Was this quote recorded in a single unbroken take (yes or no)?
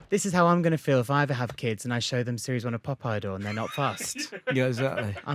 yes